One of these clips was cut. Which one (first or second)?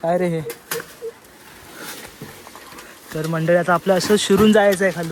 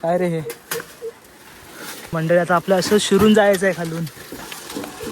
second